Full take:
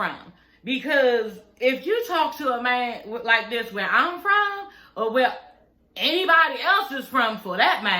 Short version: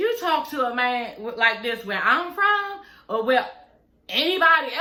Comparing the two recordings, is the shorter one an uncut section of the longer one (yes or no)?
yes